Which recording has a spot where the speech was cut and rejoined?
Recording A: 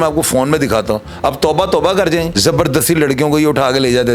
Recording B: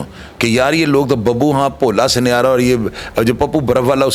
A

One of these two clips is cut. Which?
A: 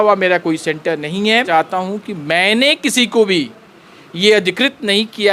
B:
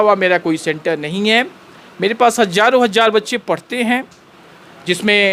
A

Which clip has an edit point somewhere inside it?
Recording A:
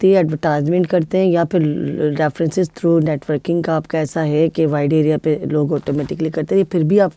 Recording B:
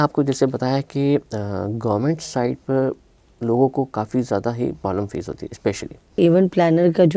B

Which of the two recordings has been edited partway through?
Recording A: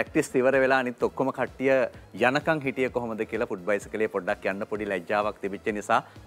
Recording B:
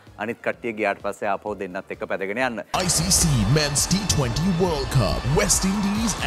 B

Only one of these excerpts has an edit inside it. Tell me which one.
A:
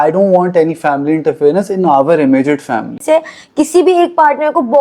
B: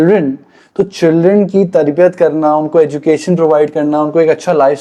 A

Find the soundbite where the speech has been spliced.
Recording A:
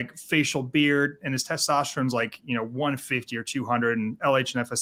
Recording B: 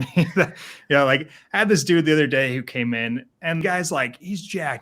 B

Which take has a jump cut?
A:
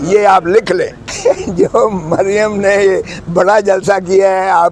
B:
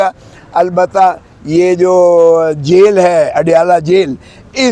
A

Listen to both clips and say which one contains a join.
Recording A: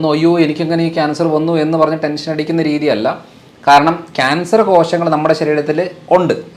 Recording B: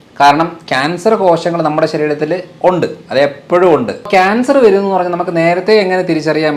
B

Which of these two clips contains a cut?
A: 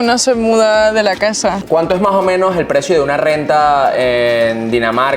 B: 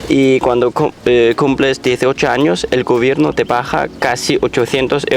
A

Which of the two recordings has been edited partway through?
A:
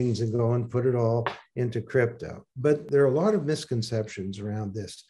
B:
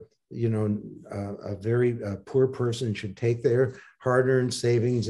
A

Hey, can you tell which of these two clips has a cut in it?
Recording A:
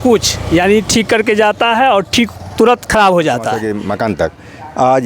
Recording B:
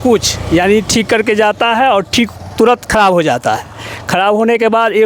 A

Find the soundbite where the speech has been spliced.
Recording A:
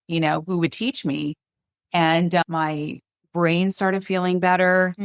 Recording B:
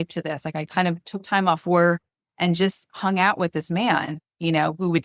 A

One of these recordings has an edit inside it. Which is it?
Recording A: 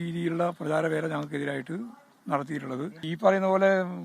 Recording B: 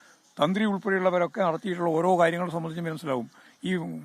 A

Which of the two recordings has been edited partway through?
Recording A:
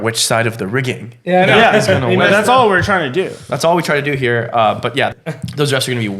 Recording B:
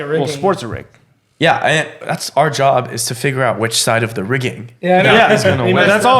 A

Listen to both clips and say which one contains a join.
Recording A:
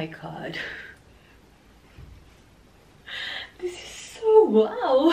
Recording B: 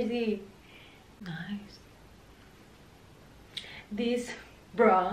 B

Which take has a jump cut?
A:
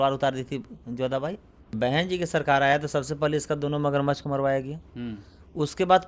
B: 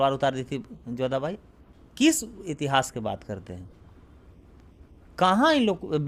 A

